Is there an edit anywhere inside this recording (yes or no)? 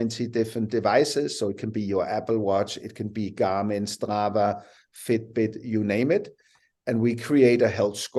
no